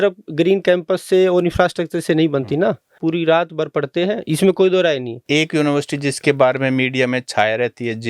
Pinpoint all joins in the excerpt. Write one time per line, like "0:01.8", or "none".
0:02.9
0:05.2

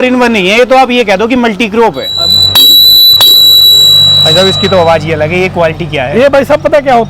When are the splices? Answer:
0:02.1

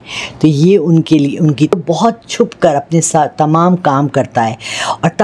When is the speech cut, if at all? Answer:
0:01.7

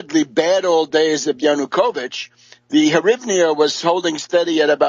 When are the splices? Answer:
0:03.0

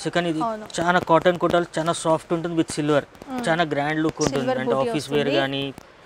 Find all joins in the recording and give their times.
none

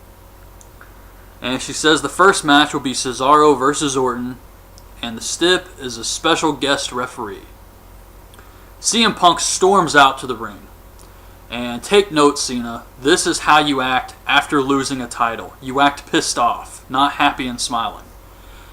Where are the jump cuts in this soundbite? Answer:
0:03.1

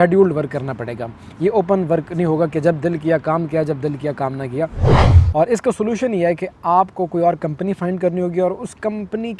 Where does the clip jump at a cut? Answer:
0:04.9

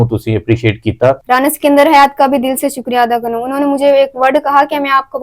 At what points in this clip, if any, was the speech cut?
0:01.2

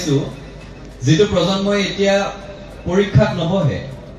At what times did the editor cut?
none

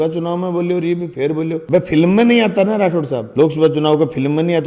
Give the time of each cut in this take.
none

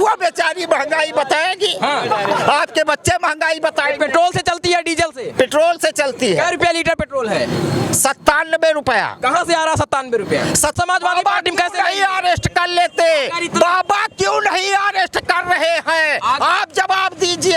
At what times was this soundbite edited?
0:10.7

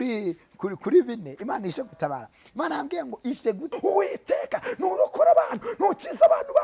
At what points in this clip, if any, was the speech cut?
0:03.7

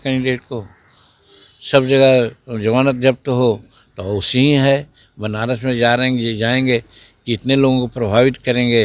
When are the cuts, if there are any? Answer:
none

